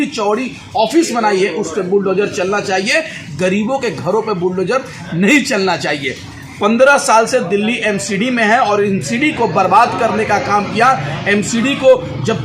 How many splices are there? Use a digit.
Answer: 0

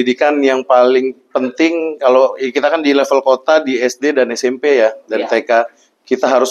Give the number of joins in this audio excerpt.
0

